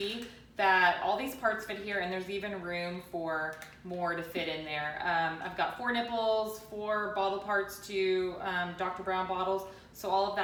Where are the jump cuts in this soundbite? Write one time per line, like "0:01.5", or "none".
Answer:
none